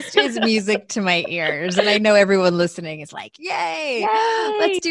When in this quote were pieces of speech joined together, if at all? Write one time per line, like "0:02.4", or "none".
none